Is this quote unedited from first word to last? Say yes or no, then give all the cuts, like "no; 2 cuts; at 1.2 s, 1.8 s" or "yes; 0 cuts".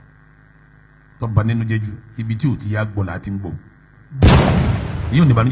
yes; 0 cuts